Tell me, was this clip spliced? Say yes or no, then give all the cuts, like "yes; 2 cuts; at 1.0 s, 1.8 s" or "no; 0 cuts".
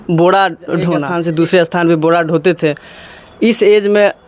yes; 1 cut; at 1.1 s